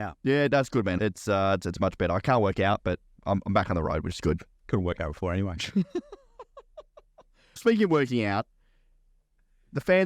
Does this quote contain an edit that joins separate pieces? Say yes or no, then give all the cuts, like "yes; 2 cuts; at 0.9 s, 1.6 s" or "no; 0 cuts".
yes; 3 cuts; at 1.0 s, 3.1 s, 7.6 s